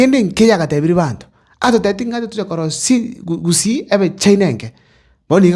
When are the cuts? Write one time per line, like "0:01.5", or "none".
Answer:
none